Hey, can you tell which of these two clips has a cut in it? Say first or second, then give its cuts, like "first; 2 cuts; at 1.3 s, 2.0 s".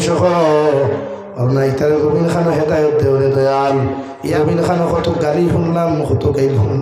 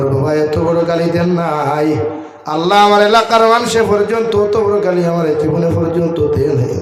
first; 1 cut; at 4.3 s